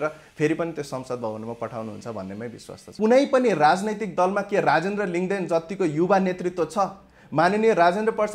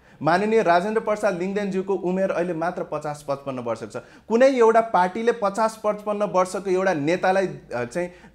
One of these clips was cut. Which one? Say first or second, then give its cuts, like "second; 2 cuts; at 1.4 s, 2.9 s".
first; 1 cut; at 2.9 s